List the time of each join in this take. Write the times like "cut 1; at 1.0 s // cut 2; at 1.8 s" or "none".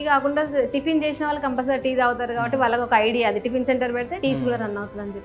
cut 1; at 4.1 s